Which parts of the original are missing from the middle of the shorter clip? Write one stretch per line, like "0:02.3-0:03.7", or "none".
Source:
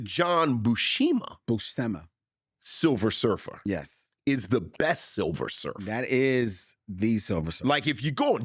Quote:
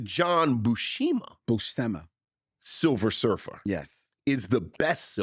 none